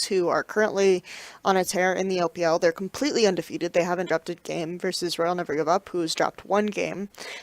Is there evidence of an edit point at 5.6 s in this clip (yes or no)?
no